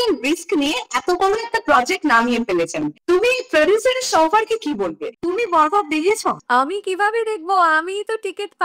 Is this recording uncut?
no; 1 cut; at 5.1 s

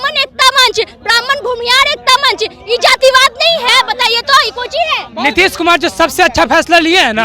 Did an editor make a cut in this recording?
yes; 1 cut; at 5.1 s

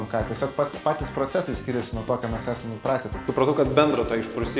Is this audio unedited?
no; 1 cut; at 3.2 s

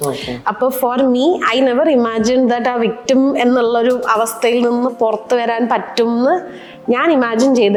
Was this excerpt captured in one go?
yes; 0 cuts

